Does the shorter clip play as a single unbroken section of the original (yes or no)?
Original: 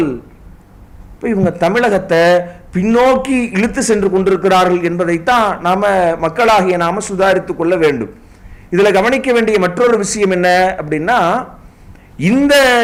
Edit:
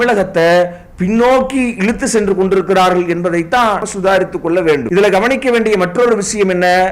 no